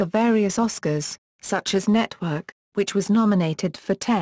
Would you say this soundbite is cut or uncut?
uncut